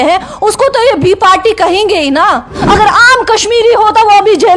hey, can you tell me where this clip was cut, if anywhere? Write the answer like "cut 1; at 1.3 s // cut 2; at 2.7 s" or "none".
cut 1; at 2.6 s